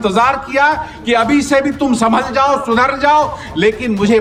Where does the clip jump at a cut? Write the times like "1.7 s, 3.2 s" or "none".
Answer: none